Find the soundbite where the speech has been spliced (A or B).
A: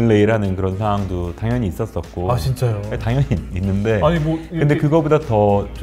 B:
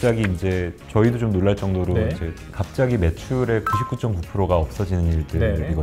B